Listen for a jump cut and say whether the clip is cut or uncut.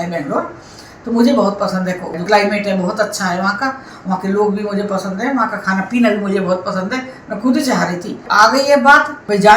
cut